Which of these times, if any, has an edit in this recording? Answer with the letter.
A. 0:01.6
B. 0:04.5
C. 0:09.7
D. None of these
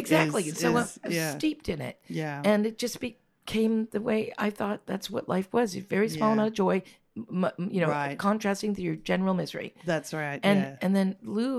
D